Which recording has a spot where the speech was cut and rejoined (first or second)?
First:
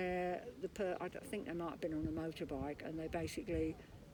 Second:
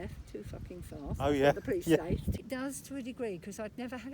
second